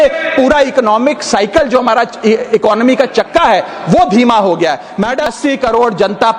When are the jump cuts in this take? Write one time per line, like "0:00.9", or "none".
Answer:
0:05.2